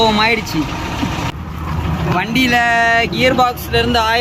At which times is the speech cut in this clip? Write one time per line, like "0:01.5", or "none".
none